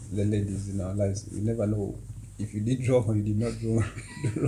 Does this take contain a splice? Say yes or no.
no